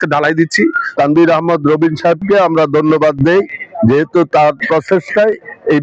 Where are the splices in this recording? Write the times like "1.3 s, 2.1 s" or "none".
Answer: 0.9 s

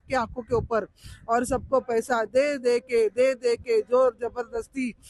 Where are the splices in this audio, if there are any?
none

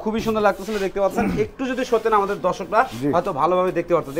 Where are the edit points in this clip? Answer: none

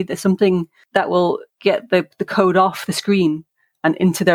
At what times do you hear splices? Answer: 1.2 s

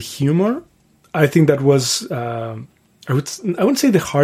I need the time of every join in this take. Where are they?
none

